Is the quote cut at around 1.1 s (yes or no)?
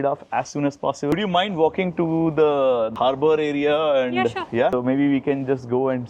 yes